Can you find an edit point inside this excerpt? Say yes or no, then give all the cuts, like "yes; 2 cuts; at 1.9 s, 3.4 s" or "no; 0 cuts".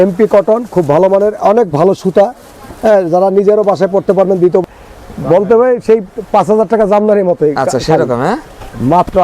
yes; 1 cut; at 4.6 s